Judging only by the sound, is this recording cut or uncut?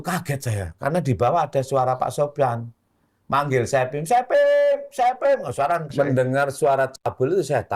cut